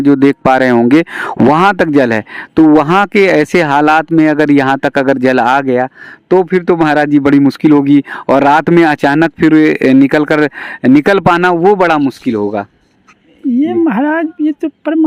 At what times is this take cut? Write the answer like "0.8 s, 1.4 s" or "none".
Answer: none